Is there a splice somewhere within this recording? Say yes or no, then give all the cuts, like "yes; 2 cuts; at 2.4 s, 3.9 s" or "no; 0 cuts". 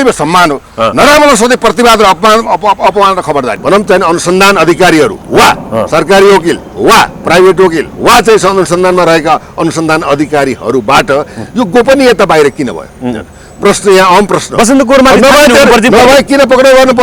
yes; 1 cut; at 3.5 s